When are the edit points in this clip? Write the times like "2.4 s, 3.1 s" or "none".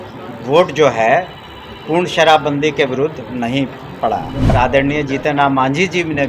4.5 s